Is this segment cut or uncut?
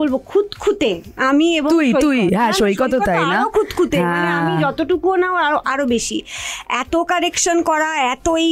uncut